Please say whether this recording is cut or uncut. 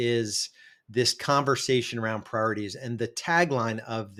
uncut